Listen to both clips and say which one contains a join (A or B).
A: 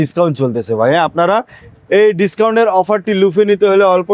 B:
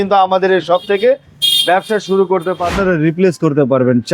B